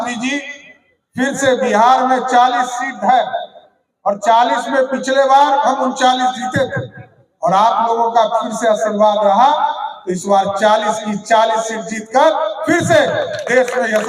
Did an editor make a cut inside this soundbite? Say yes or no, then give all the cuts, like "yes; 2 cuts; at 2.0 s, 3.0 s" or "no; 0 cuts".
no; 0 cuts